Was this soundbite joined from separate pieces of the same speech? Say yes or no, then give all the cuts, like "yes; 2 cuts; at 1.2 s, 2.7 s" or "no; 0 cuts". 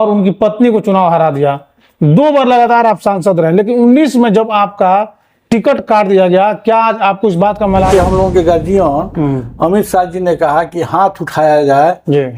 yes; 1 cut; at 7.9 s